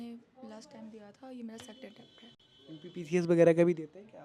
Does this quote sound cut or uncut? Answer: uncut